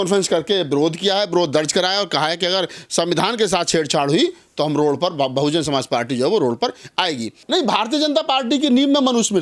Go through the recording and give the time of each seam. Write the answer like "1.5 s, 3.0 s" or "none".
7.3 s